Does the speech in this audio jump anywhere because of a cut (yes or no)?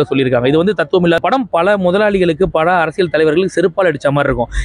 yes